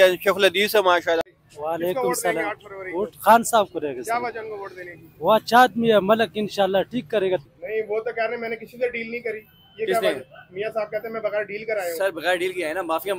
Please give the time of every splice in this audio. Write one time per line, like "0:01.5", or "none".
0:01.2
0:07.5